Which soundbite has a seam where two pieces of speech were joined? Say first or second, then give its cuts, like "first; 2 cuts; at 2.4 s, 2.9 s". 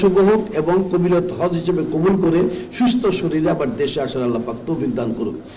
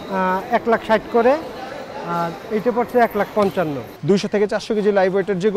second; 1 cut; at 3.9 s